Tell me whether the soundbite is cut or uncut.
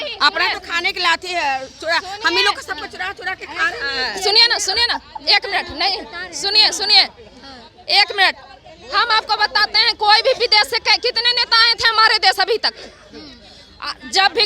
uncut